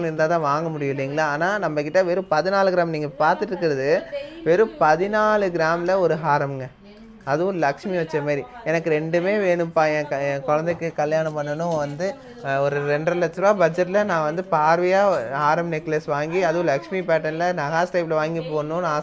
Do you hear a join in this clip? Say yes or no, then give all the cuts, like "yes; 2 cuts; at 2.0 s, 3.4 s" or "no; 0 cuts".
no; 0 cuts